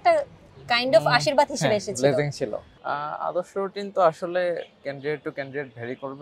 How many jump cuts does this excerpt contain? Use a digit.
1